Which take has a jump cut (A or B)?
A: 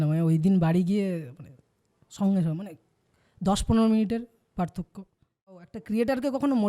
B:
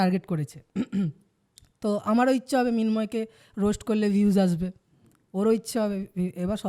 A